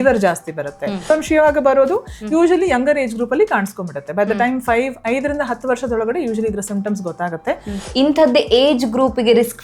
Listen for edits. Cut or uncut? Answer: cut